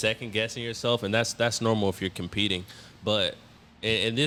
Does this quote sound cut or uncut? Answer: uncut